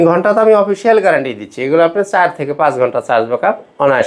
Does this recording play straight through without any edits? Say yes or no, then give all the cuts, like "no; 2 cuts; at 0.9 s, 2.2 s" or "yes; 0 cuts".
yes; 0 cuts